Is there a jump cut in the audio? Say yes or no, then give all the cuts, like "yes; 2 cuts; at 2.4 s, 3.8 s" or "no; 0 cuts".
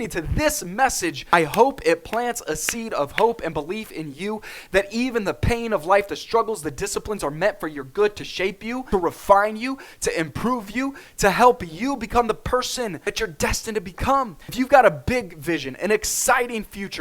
yes; 4 cuts; at 1.3 s, 8.8 s, 13.0 s, 14.4 s